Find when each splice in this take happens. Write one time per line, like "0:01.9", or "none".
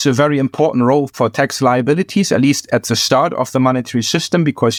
none